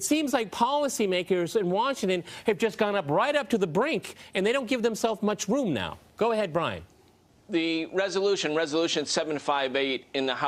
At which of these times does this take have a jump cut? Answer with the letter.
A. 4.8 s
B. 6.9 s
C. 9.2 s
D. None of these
C